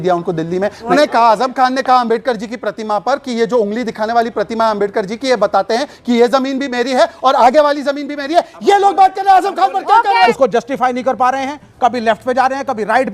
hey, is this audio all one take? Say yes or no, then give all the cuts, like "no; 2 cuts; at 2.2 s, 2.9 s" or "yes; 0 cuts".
no; 2 cuts; at 0.9 s, 10.3 s